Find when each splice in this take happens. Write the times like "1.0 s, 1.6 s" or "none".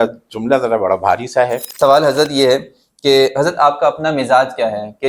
1.6 s